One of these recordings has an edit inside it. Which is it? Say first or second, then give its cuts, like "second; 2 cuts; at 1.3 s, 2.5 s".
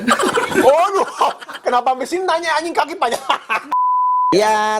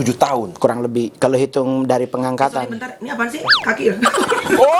first; 1 cut; at 3.7 s